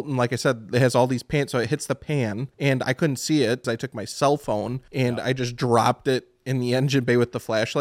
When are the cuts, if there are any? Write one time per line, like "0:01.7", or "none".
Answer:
0:02.5
0:03.6
0:04.8